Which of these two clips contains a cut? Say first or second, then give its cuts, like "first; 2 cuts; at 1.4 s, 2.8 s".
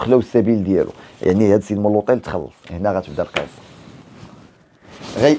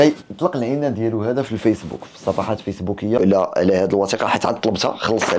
second; 1 cut; at 3.3 s